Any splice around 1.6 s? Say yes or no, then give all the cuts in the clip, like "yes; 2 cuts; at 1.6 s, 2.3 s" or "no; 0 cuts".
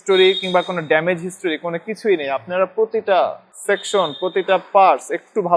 no; 1 cut; at 3.5 s